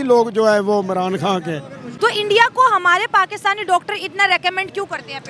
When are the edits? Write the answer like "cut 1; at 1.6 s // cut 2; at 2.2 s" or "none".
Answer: cut 1; at 1.8 s